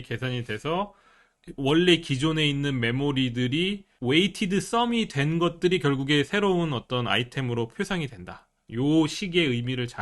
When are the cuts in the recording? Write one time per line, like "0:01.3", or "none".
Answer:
0:01.3
0:03.9